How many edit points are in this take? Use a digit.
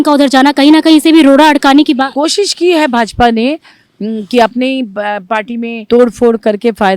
2